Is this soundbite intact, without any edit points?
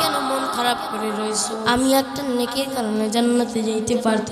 no; 1 cut; at 1.6 s

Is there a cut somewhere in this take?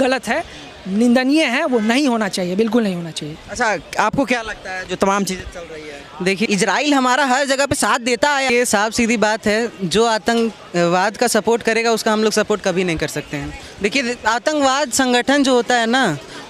no; 0 cuts

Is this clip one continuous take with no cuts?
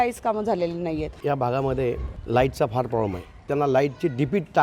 no; 3 cuts; at 1.2 s, 2.1 s, 3.4 s

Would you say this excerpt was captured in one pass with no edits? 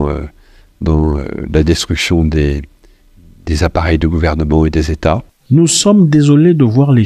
yes; 0 cuts

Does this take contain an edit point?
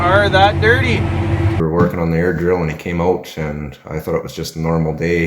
yes; 1 cut; at 1.5 s

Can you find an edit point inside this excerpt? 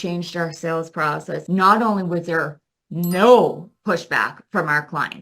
yes; 1 cut; at 1.4 s

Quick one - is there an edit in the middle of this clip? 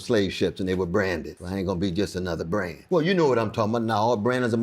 yes; 2 cuts; at 1.3 s, 2.8 s

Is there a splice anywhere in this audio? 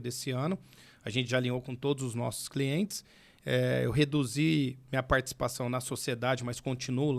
no; 0 cuts

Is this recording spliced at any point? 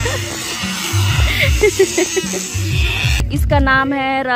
yes; 1 cut; at 3.2 s

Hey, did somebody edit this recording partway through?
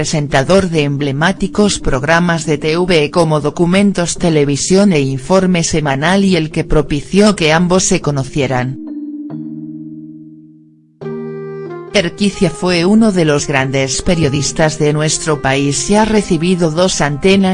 yes; 1 cut; at 1.3 s

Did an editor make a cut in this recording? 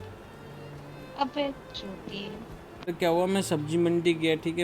yes; 1 cut; at 2.9 s

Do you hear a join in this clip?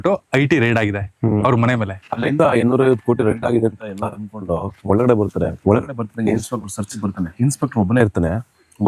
yes; 4 cuts; at 2.2 s, 4.7 s, 5.6 s, 7.3 s

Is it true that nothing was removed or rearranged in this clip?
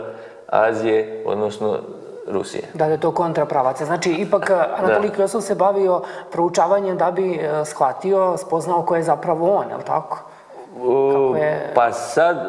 yes; 0 cuts

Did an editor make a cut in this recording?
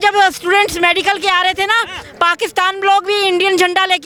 no; 0 cuts

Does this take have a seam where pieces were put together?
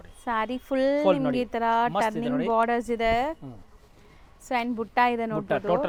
no; 0 cuts

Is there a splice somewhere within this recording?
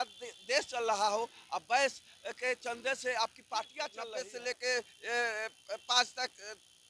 yes; 1 cut; at 4.0 s

